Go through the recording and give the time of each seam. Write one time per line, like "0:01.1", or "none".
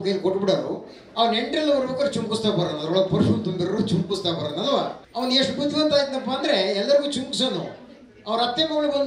0:05.0